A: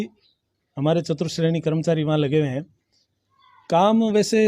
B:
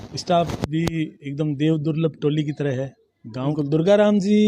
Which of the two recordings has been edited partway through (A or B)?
B